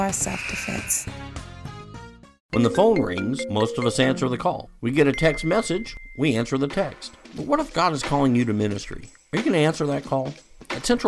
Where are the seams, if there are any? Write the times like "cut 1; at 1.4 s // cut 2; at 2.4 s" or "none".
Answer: cut 1; at 2.3 s